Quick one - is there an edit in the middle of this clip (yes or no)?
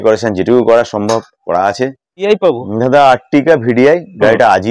yes